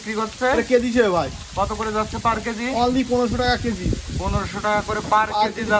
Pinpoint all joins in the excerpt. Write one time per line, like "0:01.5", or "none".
none